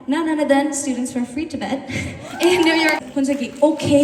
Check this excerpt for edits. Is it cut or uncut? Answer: cut